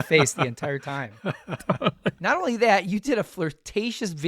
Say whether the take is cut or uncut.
cut